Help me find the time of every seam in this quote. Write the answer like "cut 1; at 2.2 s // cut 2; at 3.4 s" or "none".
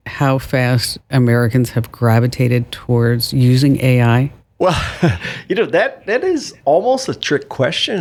none